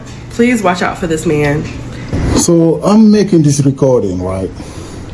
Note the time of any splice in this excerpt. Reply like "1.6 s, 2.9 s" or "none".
2.1 s